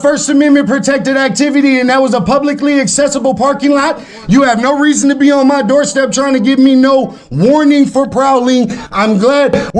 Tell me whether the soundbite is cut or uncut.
uncut